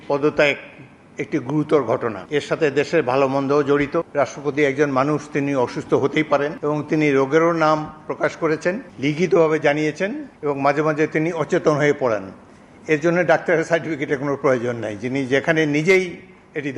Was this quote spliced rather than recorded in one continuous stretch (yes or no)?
yes